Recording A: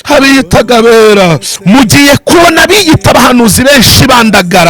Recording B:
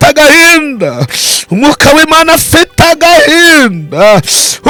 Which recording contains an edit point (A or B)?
A